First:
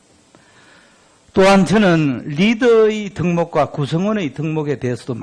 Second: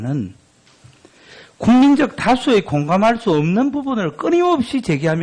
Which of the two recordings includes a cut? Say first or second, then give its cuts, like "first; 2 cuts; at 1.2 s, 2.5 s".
second; 1 cut; at 2.2 s